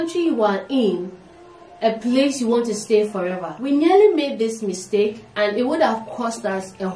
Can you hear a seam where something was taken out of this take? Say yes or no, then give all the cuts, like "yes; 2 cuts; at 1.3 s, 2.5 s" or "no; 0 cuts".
yes; 1 cut; at 3.5 s